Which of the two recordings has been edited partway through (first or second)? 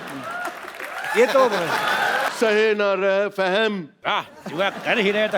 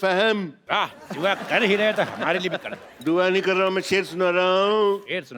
first